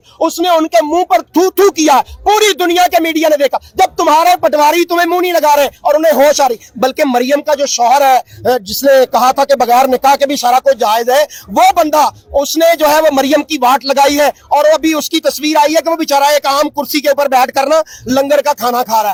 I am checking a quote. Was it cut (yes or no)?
no